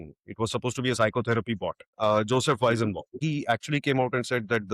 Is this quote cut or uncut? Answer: cut